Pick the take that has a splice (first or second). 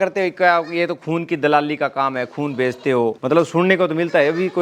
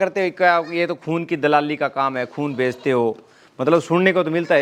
first